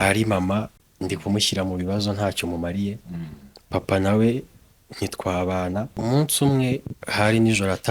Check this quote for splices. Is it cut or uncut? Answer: cut